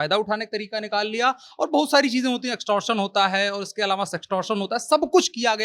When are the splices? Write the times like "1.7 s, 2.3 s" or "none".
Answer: none

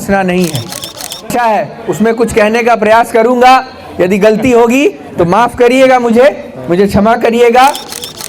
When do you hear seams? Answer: 1.3 s

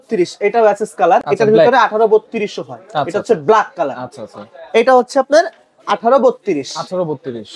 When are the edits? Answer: none

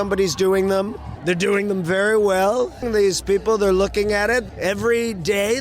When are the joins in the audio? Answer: 1.1 s, 2.8 s, 4.5 s

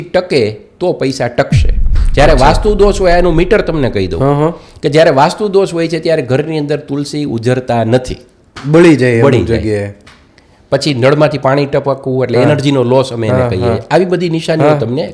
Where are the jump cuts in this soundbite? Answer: none

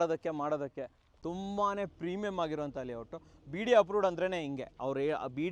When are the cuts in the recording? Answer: 1.2 s

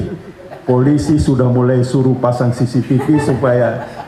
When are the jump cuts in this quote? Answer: none

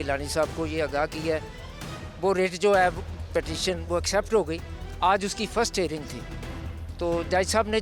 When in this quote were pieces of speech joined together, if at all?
none

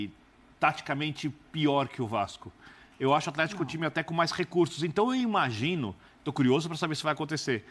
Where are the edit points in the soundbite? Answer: none

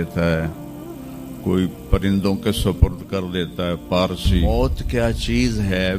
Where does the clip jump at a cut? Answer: 4.4 s

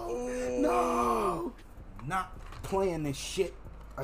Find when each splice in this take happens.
1.8 s

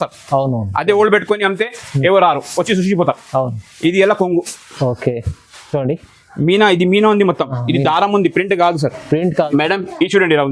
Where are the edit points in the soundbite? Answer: 9.5 s

